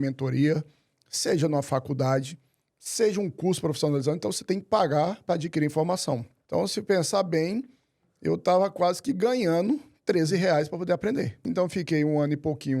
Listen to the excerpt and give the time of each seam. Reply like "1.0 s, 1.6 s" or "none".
6.3 s, 11.4 s